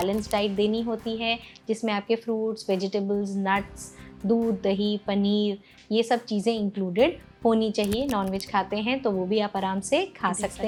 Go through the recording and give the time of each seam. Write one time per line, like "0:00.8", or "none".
none